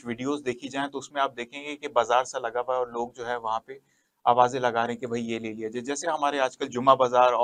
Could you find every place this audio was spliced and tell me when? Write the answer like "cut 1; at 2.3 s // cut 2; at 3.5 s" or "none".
none